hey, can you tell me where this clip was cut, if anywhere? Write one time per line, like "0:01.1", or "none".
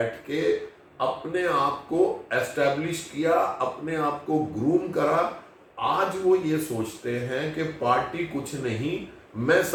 none